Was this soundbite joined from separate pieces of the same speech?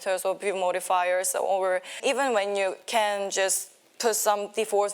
yes; 1 cut; at 1.9 s

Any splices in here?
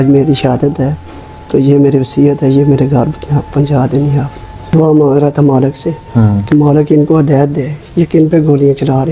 yes; 1 cut; at 4.7 s

